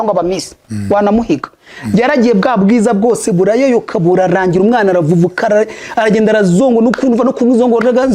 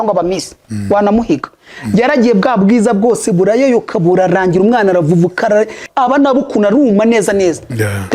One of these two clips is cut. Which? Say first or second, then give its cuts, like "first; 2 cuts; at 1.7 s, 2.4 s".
second; 1 cut; at 5.8 s